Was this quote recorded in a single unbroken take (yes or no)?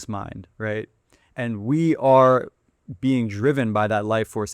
yes